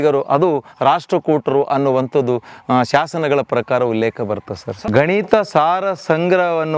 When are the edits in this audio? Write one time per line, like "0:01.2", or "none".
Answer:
0:04.8